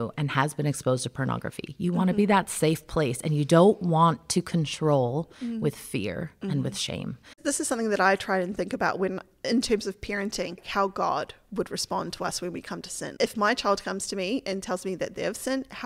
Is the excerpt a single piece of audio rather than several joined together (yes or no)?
no